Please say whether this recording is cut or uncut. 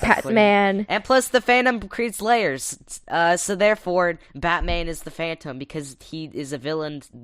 cut